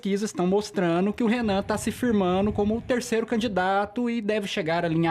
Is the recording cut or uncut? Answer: uncut